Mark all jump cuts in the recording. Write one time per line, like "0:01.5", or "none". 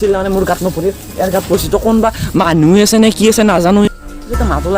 0:03.8